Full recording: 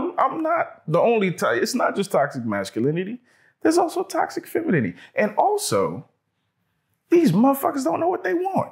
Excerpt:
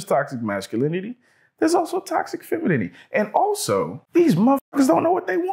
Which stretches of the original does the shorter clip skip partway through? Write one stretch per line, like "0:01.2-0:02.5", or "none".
0:06.0-0:07.0